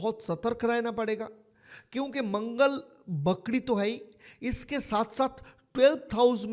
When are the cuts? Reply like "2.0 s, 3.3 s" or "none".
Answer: none